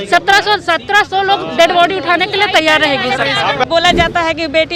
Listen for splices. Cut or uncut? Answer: cut